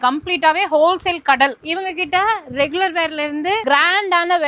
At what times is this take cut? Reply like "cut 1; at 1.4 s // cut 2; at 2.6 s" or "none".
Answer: cut 1; at 1.7 s